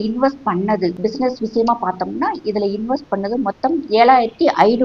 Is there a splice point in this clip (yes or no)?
yes